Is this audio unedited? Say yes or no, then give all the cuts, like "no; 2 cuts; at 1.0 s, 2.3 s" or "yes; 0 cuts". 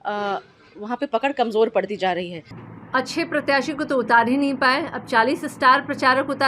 no; 1 cut; at 2.5 s